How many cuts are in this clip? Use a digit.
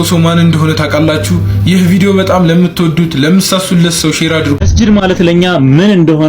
1